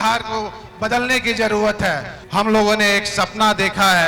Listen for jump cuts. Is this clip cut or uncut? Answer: cut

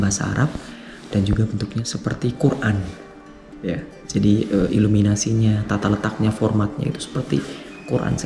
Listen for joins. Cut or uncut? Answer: cut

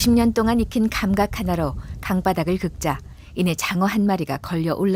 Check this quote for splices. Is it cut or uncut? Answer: uncut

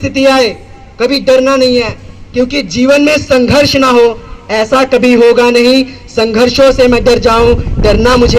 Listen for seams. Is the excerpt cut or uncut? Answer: uncut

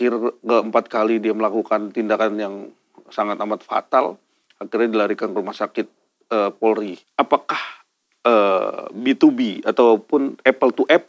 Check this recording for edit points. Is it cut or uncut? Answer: cut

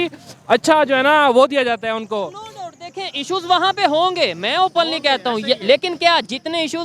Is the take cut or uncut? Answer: uncut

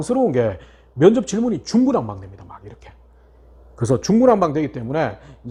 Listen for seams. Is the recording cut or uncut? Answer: uncut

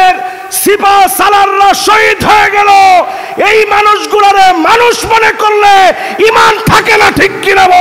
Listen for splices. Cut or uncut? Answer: uncut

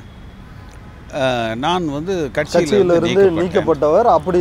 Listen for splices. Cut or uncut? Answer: uncut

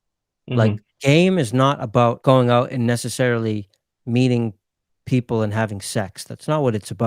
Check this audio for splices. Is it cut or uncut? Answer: cut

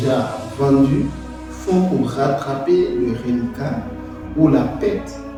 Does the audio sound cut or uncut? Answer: uncut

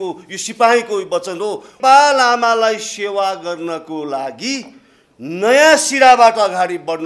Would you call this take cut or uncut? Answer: cut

